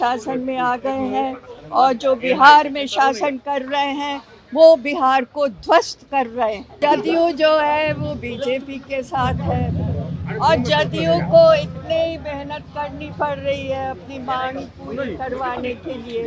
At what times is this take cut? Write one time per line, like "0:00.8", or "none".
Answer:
0:06.7